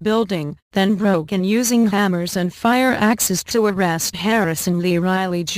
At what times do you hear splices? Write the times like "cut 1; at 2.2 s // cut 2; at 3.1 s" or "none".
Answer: cut 1; at 1.4 s